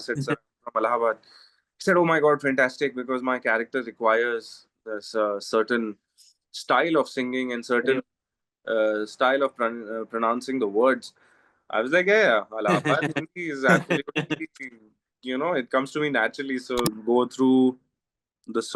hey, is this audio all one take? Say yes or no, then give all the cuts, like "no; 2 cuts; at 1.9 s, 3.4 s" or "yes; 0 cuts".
no; 1 cut; at 16.9 s